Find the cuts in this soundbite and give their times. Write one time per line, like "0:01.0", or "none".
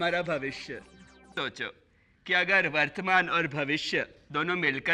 0:01.4

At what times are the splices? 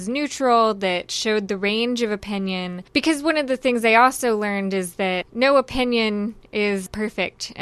0:05.2
0:06.9

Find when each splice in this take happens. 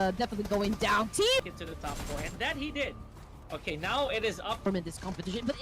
0:01.5
0:04.7

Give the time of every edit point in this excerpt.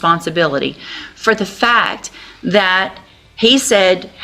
none

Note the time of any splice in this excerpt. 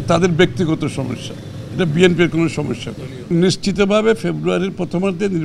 0:03.3

